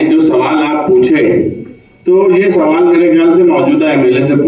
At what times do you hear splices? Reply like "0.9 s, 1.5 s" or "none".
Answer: none